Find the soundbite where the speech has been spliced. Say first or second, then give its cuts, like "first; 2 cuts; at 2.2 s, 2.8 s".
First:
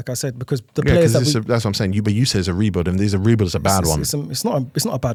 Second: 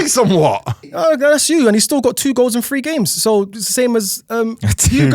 second; 1 cut; at 0.9 s